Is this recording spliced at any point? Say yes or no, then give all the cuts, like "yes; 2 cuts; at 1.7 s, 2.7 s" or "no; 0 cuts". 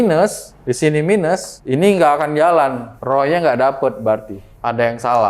no; 0 cuts